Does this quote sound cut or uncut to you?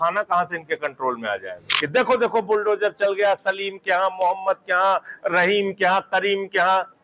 cut